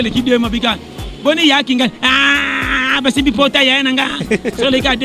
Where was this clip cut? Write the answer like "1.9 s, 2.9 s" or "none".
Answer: none

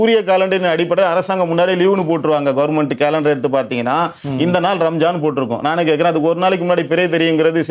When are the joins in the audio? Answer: none

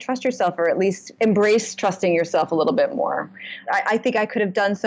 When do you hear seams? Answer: 1.1 s, 3.6 s

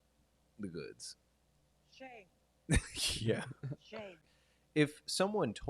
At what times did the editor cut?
4.2 s

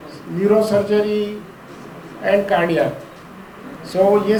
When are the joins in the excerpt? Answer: none

